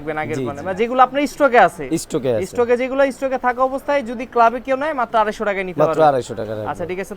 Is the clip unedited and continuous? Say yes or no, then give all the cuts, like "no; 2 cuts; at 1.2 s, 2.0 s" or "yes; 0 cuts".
yes; 0 cuts